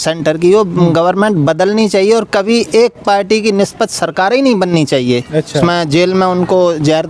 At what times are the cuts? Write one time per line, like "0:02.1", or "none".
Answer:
0:05.6